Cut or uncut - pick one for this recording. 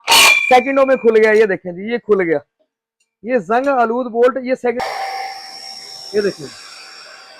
cut